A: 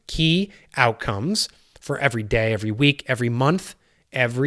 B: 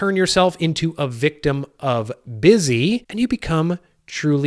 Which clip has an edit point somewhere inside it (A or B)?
B